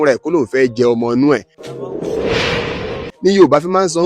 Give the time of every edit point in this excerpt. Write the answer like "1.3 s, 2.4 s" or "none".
1.6 s, 3.0 s